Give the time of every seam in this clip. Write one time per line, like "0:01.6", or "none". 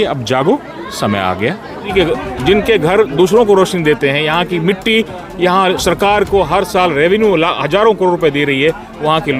0:01.9

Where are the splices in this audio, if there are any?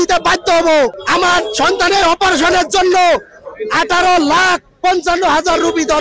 0:01.0

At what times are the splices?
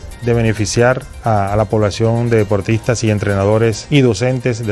0:01.1
0:03.8

